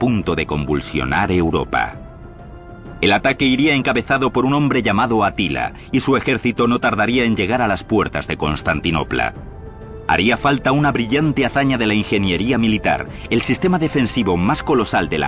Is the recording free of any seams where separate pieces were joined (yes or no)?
yes